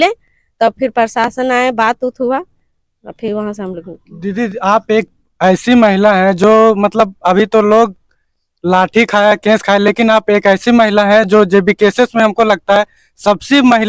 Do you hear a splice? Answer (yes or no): no